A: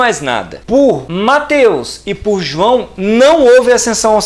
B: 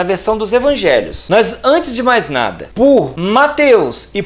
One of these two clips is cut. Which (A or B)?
B